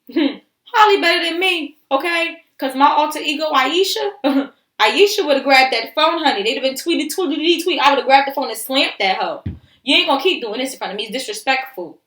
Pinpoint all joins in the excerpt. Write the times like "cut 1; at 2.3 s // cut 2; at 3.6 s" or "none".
cut 1; at 9.7 s